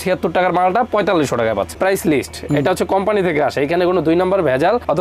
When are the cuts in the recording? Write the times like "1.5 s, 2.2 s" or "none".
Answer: 1.7 s